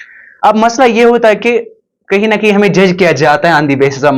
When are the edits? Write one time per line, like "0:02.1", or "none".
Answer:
none